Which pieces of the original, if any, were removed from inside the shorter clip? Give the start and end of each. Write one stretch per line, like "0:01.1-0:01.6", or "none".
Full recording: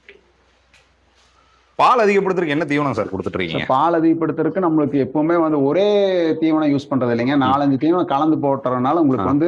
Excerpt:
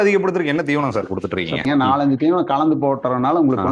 0:03.6-0:07.2